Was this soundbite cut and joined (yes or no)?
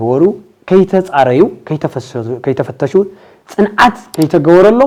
no